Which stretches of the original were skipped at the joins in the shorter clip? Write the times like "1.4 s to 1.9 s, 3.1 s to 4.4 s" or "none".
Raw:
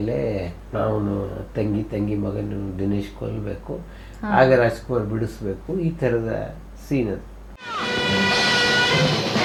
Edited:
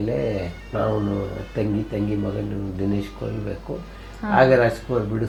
none